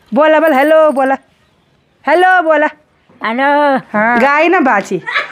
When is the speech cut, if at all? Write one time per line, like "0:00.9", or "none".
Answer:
0:04.2